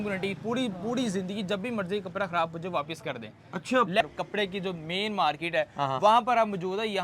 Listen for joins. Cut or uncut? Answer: cut